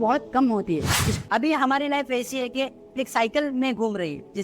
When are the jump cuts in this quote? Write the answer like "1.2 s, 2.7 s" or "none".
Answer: 1.0 s